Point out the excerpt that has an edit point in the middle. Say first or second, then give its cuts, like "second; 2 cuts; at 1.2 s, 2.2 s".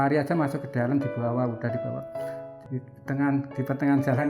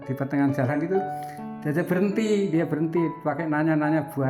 first; 1 cut; at 2.5 s